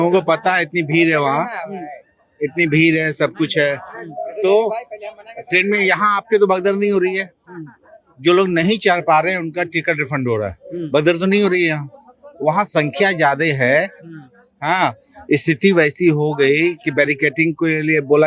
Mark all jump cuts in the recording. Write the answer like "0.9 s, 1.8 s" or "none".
none